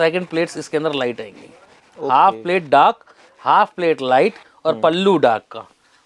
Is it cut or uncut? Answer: uncut